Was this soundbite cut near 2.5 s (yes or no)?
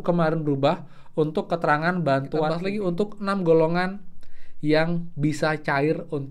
yes